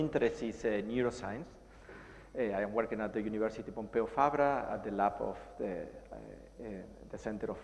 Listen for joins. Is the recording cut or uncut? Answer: uncut